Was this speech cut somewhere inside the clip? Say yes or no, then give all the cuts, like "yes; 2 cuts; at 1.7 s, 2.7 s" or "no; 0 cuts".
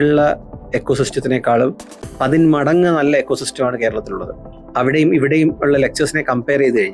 no; 0 cuts